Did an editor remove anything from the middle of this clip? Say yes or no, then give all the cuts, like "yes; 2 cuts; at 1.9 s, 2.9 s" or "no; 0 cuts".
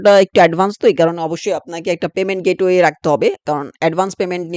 no; 0 cuts